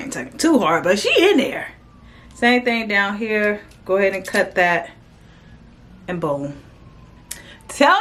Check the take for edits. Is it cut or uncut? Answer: uncut